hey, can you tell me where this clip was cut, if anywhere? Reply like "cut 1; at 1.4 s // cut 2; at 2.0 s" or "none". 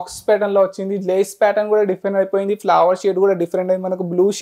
none